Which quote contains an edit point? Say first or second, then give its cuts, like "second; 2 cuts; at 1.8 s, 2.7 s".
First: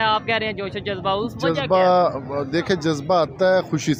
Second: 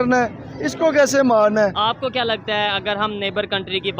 second; 1 cut; at 1.8 s